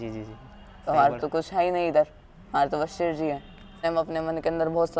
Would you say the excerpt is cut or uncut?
cut